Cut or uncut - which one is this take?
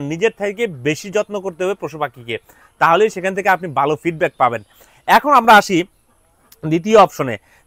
uncut